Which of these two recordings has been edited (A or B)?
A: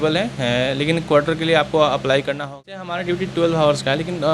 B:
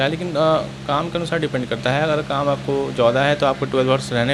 A